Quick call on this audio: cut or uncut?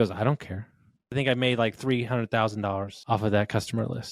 cut